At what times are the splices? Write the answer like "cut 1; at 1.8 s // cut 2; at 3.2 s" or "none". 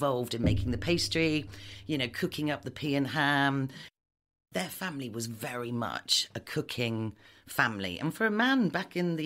cut 1; at 4.0 s